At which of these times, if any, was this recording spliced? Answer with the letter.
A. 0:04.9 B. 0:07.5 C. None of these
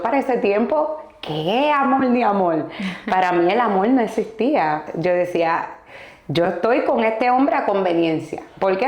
A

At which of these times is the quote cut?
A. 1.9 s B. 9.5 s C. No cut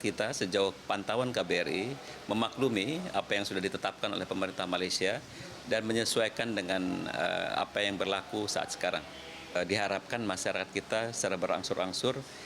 B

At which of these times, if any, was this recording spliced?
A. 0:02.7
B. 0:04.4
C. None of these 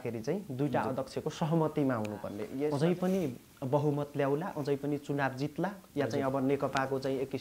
A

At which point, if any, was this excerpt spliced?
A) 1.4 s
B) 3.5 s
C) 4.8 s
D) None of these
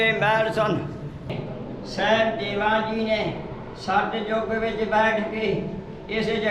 A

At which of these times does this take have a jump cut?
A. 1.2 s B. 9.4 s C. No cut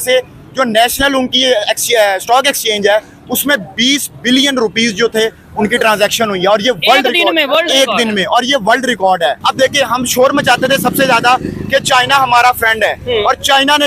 B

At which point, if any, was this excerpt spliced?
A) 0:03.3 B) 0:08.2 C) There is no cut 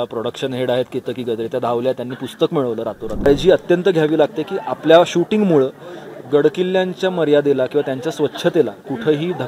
A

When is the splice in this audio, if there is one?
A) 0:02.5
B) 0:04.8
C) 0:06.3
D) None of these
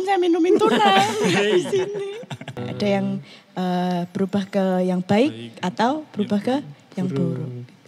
A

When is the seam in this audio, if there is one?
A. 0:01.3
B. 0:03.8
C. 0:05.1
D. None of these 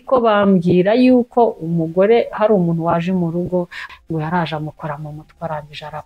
B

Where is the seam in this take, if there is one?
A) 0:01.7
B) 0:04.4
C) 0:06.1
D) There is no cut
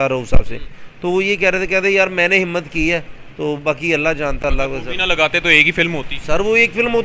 D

